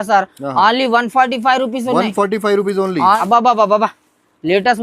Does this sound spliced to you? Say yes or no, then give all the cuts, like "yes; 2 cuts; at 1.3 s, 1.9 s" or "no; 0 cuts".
yes; 1 cut; at 3.2 s